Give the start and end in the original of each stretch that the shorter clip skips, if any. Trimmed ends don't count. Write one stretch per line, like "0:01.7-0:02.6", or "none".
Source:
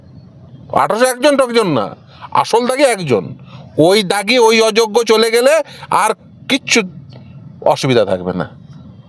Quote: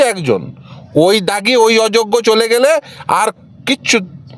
none

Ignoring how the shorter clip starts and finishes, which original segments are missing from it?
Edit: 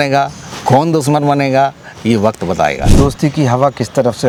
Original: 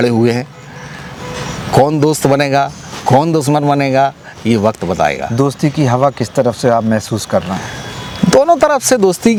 none

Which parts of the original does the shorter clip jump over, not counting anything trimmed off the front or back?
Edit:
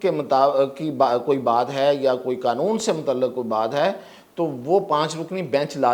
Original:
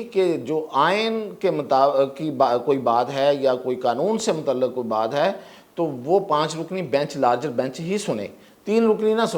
none

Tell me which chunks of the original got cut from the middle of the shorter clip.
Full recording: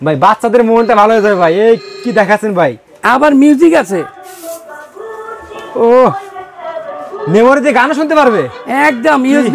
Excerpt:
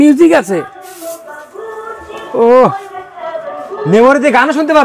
none

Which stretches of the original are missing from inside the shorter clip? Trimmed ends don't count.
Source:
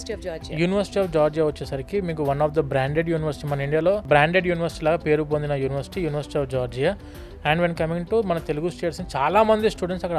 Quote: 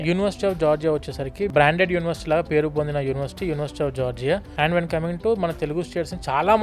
0:02.0-0:04.0
0:07.0-0:07.3

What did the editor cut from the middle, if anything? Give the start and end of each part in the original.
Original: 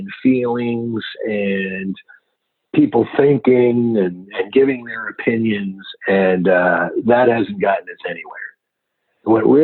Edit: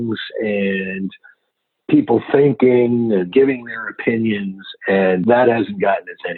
0:04.1-0:04.5
0:06.4-0:07.0

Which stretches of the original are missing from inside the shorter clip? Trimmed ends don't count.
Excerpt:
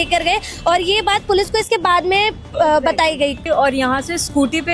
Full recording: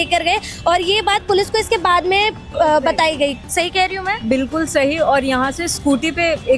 0:03.4-0:04.9

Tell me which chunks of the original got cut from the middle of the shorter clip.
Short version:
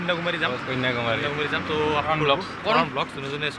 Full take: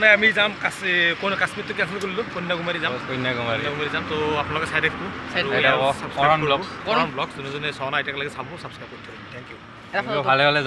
0:04.5-0:06.3

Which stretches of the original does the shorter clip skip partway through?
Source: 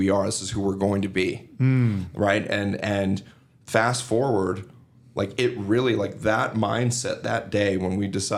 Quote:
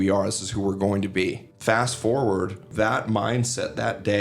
0:01.5-0:03.5
0:04.7-0:06.1

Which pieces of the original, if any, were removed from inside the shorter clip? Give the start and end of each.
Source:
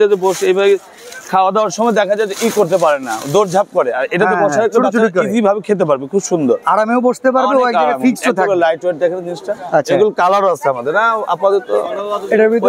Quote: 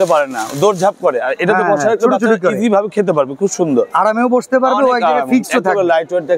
none

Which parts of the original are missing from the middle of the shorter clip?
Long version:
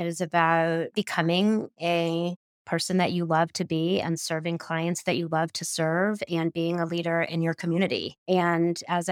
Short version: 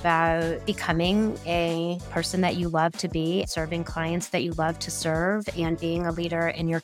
0:01.9-0:02.1
0:04.0-0:04.2

